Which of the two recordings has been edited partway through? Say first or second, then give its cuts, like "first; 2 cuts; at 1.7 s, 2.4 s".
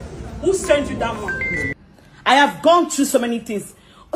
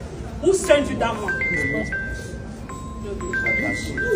first; 1 cut; at 1.7 s